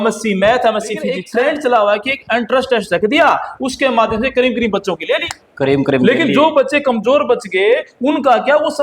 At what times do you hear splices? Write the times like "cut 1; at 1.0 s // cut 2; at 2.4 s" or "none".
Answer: cut 1; at 1.2 s